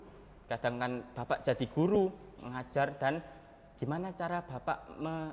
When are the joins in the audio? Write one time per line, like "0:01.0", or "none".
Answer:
none